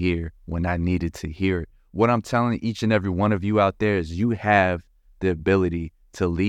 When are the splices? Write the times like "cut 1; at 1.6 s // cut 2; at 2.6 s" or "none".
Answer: none